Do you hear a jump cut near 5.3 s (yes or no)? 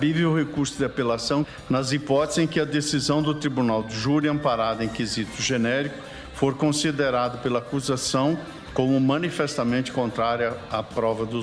no